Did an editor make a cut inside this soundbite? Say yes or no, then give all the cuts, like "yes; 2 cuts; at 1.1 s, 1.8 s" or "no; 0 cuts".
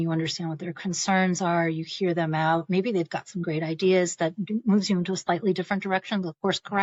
no; 0 cuts